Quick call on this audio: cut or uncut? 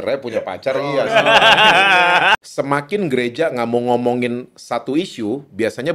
cut